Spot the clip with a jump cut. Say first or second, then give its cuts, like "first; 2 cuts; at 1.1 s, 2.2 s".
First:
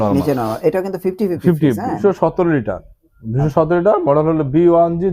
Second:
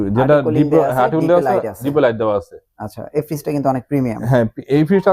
first; 1 cut; at 2.0 s